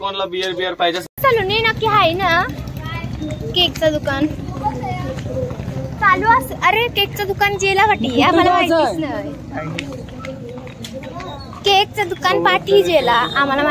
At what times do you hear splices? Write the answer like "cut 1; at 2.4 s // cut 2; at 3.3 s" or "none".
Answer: cut 1; at 1.2 s